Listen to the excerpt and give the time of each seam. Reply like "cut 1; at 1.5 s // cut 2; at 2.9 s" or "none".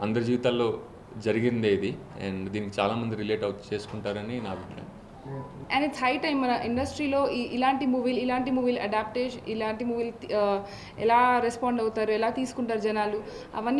cut 1; at 5.6 s